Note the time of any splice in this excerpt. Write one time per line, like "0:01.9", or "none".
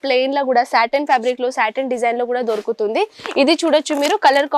none